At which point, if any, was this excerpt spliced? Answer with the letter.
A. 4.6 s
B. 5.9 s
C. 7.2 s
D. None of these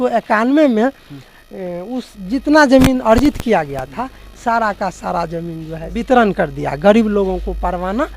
B